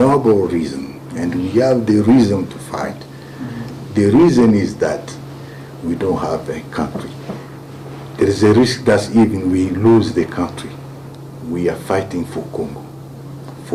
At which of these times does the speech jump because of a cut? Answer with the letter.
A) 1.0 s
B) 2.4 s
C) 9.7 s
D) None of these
D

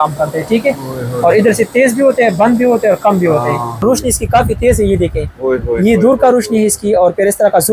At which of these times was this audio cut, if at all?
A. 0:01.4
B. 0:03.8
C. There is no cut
B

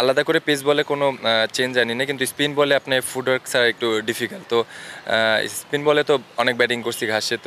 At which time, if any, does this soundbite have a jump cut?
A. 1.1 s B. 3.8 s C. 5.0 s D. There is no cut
D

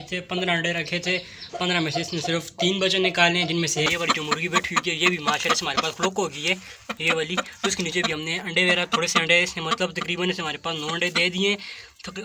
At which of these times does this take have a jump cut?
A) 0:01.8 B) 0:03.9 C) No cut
B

